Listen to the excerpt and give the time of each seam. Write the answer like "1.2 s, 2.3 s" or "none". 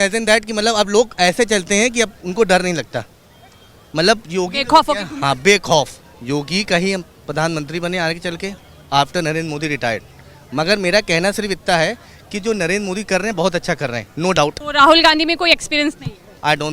6.0 s, 14.6 s